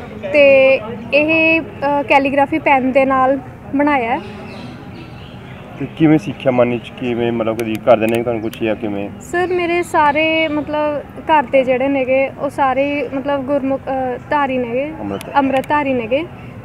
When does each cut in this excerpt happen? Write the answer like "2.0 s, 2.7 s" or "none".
none